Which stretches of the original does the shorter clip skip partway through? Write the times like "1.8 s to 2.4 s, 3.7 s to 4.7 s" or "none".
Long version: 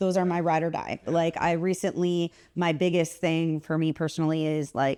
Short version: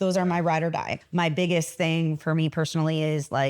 1.0 s to 2.4 s